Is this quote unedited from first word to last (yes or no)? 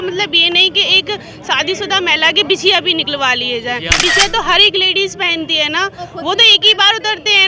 no